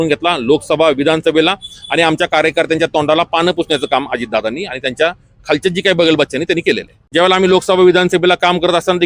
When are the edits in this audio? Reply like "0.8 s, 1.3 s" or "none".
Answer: 6.9 s